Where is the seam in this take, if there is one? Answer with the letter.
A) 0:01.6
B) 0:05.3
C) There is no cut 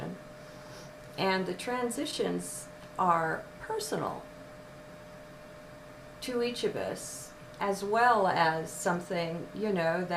A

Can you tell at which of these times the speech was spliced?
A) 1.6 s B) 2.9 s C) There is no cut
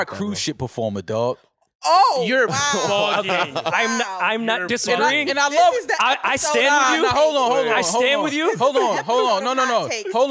C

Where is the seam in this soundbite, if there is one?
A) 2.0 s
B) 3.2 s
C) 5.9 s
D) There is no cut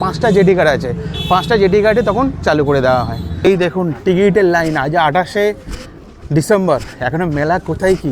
B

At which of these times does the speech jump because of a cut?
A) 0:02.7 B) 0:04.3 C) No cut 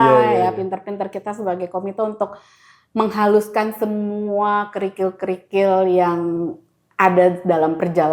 C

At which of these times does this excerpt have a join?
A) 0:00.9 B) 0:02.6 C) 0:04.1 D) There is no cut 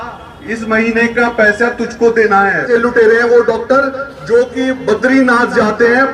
B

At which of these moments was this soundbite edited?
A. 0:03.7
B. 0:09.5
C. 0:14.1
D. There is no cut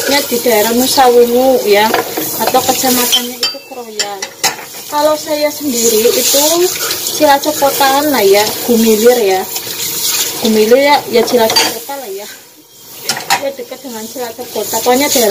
D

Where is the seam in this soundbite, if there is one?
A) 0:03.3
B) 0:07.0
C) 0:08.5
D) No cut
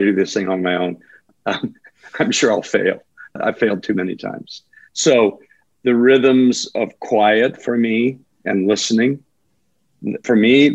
A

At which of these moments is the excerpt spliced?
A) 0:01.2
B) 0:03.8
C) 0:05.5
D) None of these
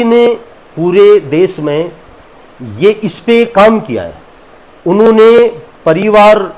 D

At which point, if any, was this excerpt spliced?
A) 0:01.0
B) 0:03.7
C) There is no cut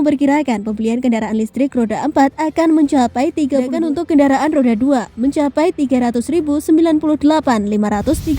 B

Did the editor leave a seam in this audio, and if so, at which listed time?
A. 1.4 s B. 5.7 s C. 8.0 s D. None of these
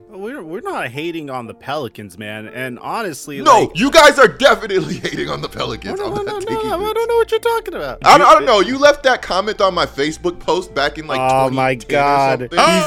C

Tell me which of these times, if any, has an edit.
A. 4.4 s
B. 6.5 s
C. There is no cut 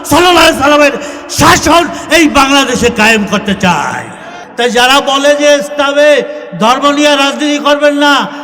A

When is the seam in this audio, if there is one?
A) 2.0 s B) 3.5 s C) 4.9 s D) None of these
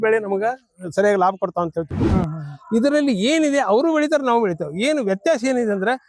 A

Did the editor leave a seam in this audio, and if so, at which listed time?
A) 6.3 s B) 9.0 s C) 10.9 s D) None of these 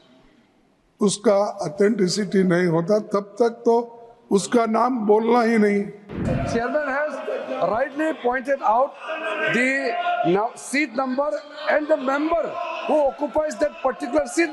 A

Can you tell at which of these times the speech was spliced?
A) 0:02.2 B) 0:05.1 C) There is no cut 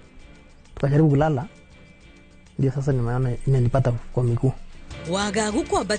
B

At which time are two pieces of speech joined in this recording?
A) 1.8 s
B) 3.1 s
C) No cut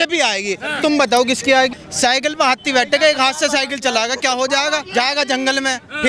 A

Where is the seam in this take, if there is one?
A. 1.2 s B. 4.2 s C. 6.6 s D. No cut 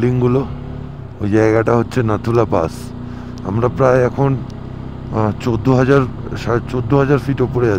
D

